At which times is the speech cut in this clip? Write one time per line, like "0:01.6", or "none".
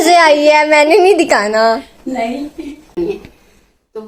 0:03.0